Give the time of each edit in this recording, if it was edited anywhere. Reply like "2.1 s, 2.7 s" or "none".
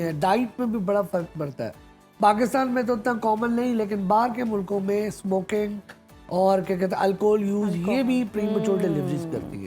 none